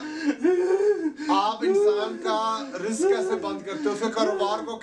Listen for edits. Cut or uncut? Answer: uncut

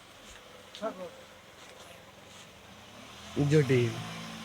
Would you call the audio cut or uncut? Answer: uncut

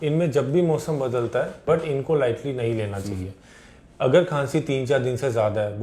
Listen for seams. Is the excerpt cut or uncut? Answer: cut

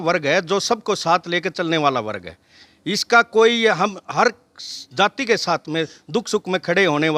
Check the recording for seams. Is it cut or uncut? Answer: uncut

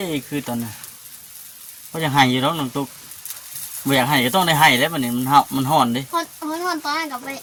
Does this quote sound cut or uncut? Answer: uncut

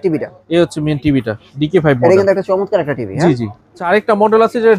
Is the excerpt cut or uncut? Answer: cut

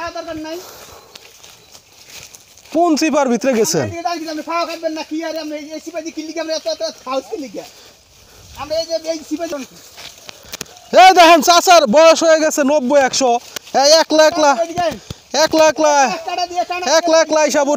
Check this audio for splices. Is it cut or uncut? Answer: cut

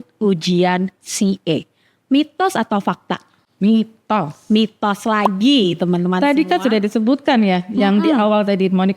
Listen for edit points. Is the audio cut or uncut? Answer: uncut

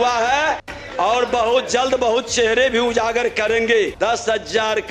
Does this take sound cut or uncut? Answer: cut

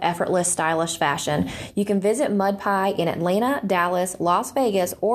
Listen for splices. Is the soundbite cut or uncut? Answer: uncut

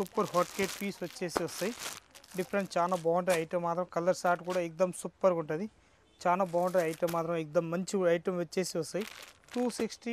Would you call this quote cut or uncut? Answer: uncut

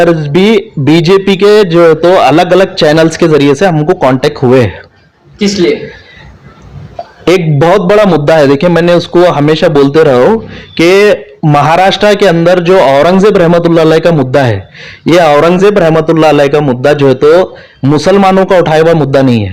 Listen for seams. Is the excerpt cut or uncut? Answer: uncut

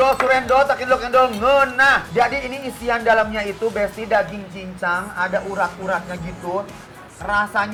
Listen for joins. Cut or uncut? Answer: uncut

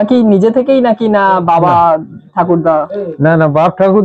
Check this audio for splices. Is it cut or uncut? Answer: uncut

